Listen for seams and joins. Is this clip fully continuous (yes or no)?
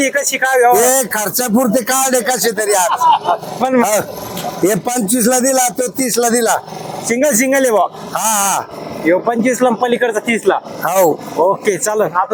yes